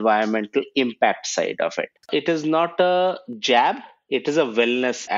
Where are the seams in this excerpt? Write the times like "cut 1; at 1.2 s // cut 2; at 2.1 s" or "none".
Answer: cut 1; at 1.9 s

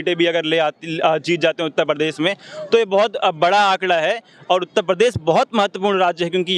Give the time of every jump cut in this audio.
none

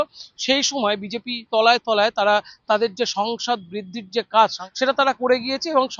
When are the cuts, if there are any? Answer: cut 1; at 4.6 s

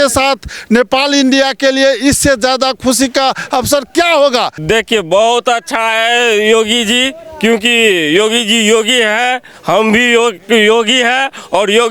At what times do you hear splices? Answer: cut 1; at 4.6 s

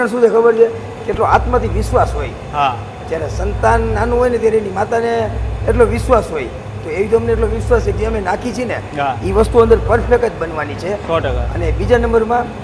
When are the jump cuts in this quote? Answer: none

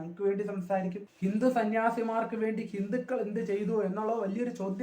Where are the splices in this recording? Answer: cut 1; at 1.1 s

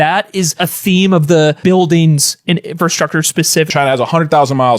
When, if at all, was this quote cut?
cut 1; at 3.7 s

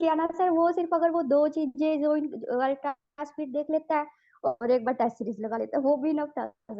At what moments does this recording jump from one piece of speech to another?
none

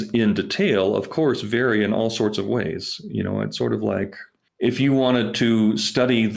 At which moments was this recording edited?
none

